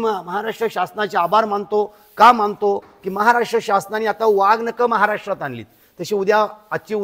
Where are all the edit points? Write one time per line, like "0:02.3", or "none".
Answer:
none